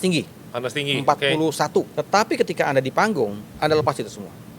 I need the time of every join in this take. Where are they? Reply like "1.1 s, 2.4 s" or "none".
1.9 s, 3.4 s